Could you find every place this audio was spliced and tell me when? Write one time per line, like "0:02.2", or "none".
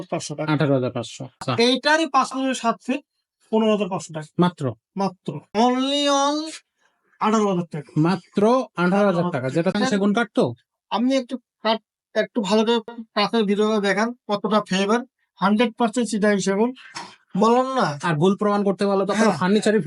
0:01.5
0:05.5
0:09.7